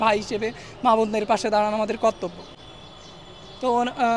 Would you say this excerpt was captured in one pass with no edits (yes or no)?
yes